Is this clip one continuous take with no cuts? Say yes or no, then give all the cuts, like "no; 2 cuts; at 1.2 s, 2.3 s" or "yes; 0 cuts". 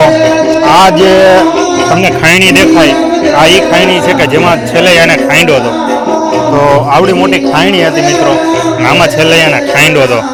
yes; 0 cuts